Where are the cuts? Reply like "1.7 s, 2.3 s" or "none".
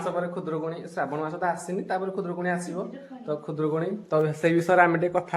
none